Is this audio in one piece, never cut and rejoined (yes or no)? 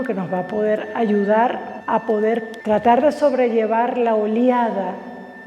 no